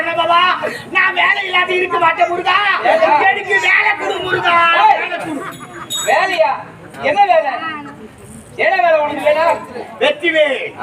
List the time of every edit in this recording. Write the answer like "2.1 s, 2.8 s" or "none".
9.8 s